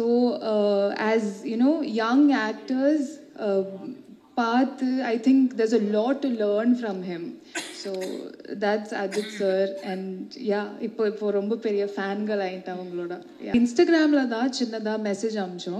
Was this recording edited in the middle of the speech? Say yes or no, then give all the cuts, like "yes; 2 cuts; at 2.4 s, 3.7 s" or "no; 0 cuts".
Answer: yes; 1 cut; at 13.5 s